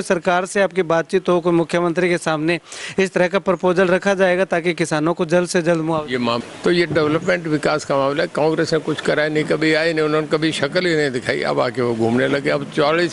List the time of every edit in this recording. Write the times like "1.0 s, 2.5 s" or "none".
6.4 s